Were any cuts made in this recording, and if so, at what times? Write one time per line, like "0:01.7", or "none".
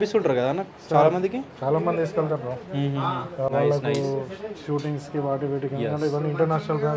none

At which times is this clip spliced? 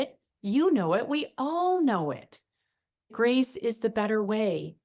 0:03.1

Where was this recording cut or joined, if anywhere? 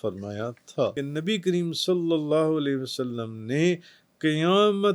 0:01.0

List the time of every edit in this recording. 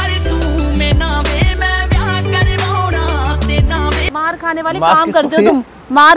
0:04.1

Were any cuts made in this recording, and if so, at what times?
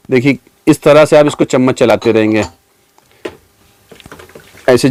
none

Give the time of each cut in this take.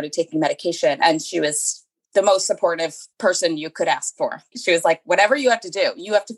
0:01.0
0:03.0
0:04.5

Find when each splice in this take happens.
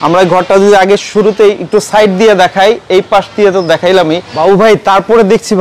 0:04.3

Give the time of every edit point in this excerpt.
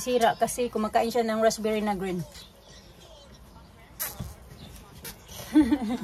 none

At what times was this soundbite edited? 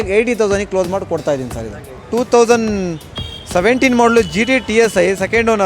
0:02.0

